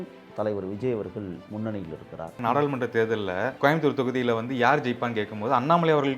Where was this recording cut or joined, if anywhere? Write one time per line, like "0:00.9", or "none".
0:02.3